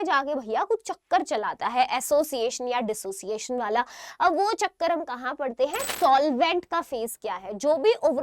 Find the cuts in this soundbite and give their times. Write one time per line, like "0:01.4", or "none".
0:05.8